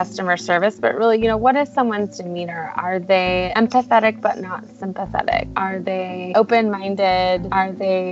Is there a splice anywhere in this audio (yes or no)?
no